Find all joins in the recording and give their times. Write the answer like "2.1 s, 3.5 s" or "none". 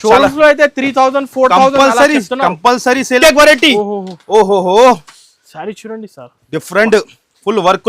3.2 s